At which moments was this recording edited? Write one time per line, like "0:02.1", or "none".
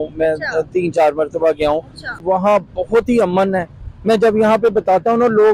0:02.0